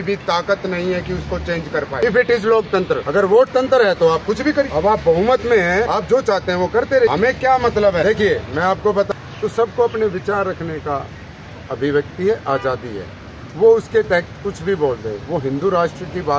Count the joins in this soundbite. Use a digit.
7